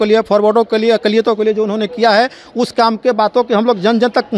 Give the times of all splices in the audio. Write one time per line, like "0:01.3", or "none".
none